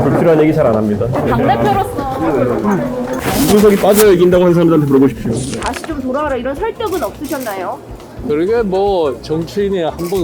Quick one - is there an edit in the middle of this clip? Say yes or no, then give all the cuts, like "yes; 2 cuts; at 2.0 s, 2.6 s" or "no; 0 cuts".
yes; 2 cuts; at 2.9 s, 5.5 s